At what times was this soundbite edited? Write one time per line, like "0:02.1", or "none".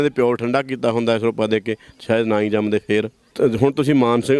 0:03.3